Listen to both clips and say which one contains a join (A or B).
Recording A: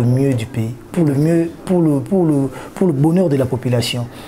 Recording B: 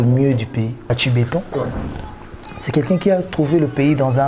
B